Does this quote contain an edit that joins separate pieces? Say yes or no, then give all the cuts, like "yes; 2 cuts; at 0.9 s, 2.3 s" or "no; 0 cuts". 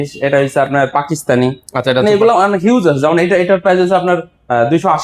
no; 0 cuts